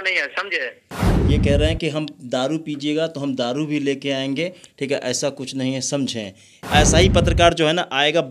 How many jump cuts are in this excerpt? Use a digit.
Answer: 1